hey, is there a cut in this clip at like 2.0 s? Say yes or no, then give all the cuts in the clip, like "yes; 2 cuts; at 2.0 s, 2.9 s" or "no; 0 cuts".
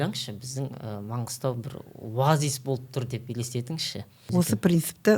no; 1 cut; at 4.2 s